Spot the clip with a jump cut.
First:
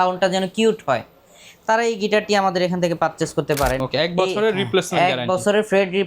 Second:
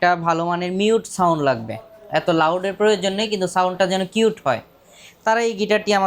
first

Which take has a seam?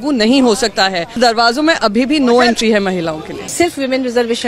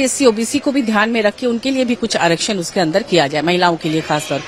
first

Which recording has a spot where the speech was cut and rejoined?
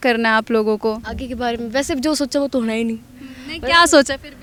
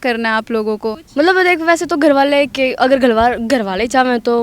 second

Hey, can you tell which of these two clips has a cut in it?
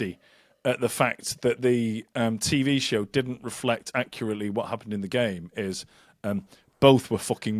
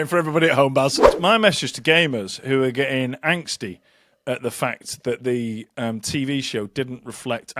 second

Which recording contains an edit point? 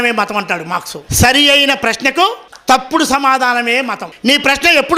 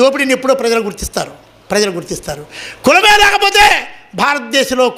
first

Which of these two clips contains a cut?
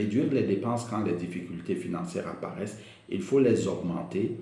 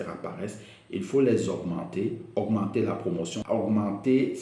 second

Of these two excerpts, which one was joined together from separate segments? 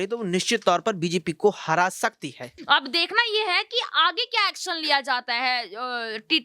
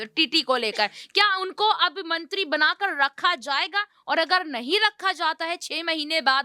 first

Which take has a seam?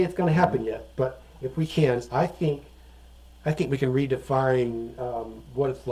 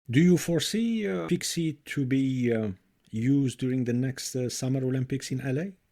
second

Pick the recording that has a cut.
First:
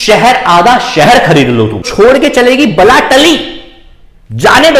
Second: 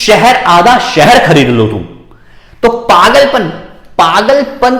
first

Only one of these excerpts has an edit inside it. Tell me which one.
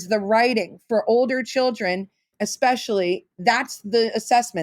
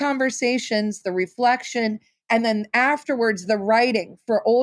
first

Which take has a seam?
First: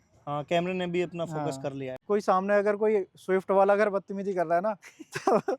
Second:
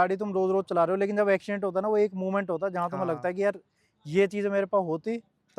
first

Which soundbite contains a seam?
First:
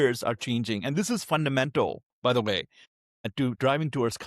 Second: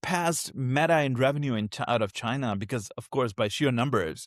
first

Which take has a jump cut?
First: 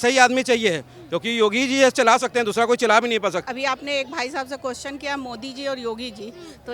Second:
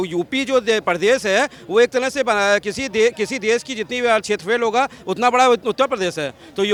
first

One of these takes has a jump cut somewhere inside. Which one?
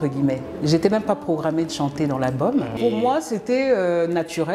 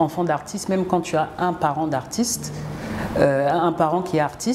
first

